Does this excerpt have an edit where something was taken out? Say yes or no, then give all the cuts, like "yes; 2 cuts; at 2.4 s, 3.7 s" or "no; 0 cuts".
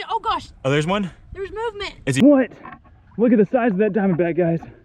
yes; 1 cut; at 2.2 s